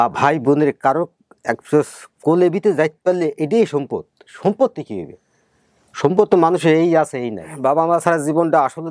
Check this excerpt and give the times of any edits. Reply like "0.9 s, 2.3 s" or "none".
7.5 s